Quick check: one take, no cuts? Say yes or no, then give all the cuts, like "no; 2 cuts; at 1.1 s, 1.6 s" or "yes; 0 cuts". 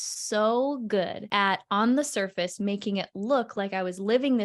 no; 1 cut; at 1.2 s